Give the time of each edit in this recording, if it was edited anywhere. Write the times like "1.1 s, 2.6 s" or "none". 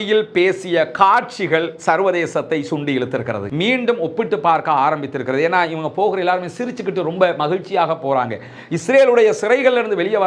3.4 s